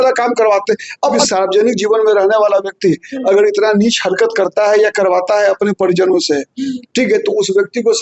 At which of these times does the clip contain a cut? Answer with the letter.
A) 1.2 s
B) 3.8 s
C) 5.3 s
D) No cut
A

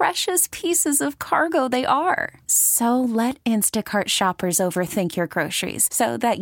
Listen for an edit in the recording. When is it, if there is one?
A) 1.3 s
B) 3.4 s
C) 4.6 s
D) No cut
D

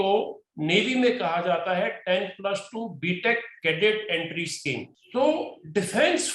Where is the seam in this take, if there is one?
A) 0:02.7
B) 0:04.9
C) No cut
B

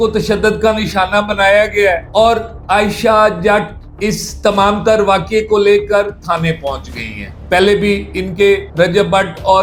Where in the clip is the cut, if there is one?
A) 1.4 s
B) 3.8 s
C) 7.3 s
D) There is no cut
D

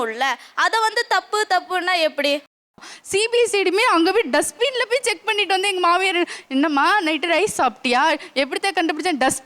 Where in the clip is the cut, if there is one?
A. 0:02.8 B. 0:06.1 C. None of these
A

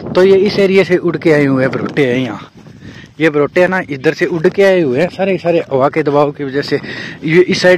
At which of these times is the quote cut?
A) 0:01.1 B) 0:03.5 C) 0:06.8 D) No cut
D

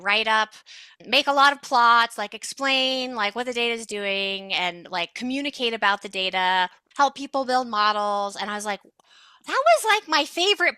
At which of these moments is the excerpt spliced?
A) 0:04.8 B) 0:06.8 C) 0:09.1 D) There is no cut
B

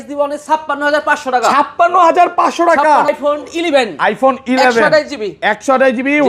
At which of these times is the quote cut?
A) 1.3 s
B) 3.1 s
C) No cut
B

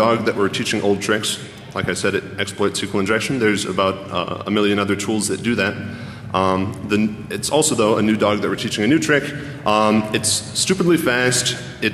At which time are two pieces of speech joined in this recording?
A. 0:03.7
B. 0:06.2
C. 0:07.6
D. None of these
C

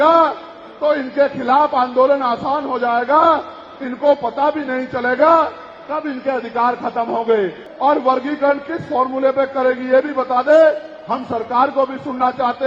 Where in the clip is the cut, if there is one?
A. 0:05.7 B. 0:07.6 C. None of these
B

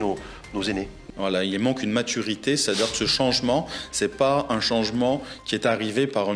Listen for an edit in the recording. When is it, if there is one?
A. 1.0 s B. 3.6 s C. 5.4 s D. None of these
A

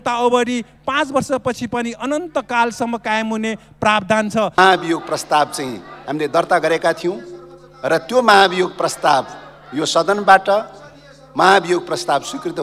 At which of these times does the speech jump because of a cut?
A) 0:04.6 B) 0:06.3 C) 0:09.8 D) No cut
A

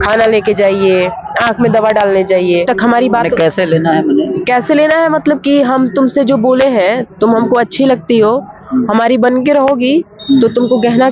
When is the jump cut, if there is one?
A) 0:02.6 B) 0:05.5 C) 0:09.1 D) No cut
A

